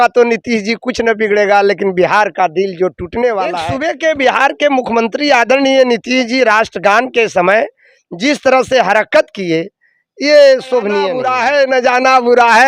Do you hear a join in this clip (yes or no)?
yes